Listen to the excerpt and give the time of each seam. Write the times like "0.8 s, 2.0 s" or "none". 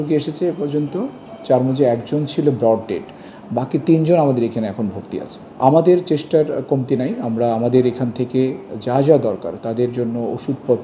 5.6 s